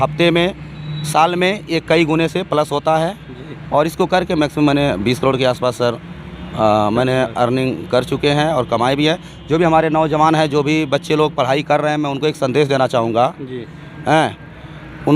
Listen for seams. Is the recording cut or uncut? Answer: uncut